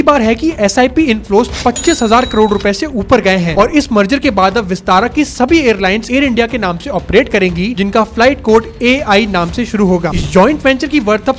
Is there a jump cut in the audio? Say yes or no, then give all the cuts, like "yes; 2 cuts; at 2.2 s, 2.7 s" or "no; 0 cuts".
yes; 2 cuts; at 3.5 s, 10.2 s